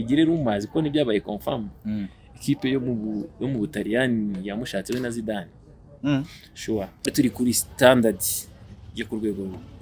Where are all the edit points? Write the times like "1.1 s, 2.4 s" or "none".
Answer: 7.1 s